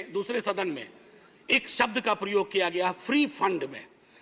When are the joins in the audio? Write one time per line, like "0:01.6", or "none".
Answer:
none